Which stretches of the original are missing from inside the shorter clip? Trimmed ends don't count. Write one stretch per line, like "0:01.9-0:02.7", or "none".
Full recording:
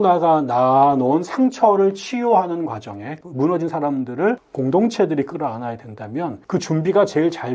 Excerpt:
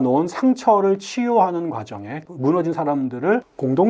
none

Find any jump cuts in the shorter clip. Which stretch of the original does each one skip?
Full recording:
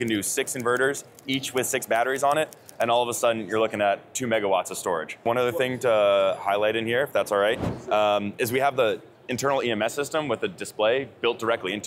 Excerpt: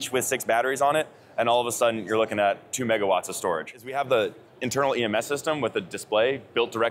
0:05.2-0:08.4

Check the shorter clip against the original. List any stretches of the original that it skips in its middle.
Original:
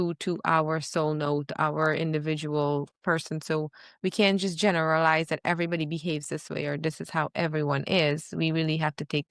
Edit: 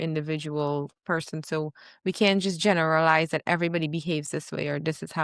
none

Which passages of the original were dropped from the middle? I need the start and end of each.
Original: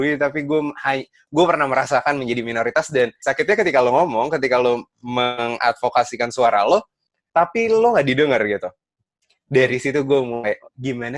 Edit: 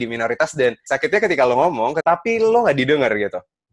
0:04.3-0:07.3

